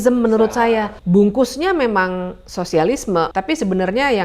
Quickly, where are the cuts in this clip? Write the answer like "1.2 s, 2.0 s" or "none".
0.9 s, 3.3 s